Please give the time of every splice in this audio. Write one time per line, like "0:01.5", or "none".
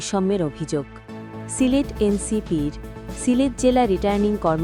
none